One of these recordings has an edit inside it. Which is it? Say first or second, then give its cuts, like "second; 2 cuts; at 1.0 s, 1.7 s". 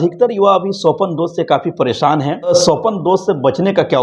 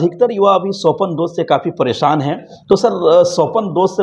first; 1 cut; at 2.5 s